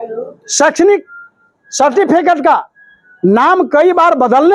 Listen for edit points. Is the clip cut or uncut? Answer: uncut